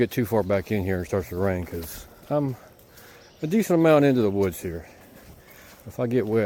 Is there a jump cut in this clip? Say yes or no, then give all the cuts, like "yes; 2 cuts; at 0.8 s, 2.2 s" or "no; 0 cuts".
no; 0 cuts